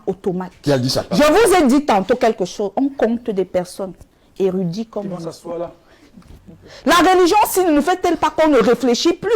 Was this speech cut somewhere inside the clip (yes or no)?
yes